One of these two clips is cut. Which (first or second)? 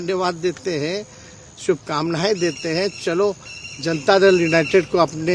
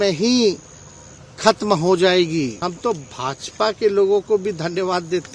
second